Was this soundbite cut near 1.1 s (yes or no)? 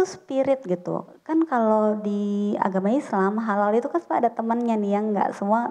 no